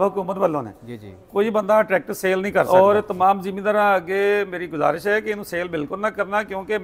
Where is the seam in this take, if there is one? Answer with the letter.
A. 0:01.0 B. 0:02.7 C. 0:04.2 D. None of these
B